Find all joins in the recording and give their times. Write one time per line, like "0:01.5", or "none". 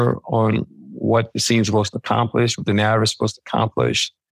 none

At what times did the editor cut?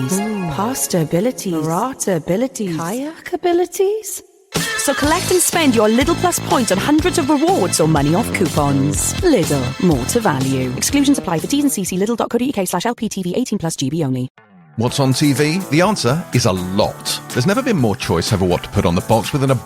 0:14.3

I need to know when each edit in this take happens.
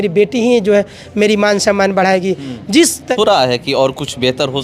0:03.1

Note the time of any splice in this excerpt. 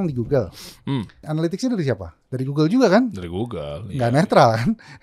0:01.3

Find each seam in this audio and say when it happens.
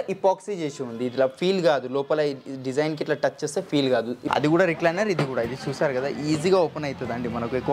0:04.2

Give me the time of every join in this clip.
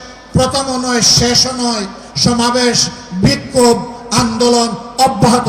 none

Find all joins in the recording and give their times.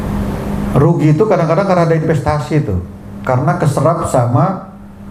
none

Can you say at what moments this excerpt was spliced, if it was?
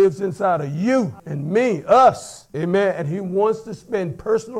none

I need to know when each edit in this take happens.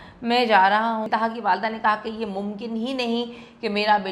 0:01.1

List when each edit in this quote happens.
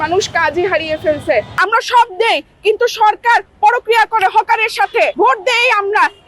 0:01.6
0:05.1

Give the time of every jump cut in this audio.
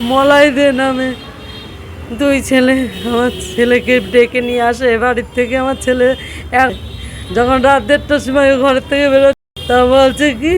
0:06.7
0:09.4

